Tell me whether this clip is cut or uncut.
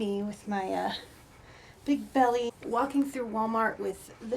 cut